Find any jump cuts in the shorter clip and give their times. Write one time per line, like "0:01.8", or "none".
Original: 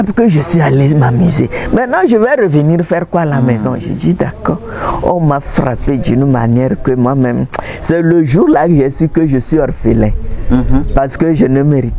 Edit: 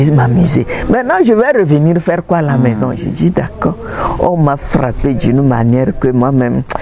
none